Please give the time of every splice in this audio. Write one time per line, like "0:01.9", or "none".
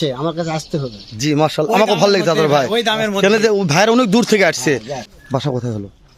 0:05.0